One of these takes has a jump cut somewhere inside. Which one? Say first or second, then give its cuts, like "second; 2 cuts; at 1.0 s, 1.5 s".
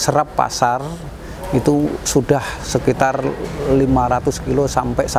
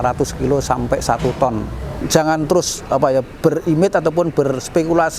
second; 1 cut; at 2.1 s